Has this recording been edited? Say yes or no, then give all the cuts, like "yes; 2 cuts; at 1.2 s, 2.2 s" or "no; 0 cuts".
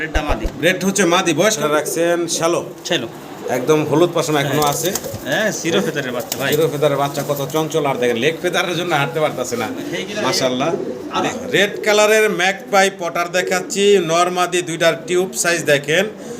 yes; 2 cuts; at 1.6 s, 11.3 s